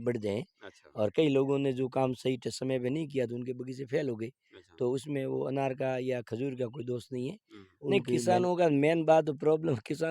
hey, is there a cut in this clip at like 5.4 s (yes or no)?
no